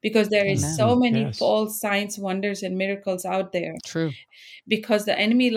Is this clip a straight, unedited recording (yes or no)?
no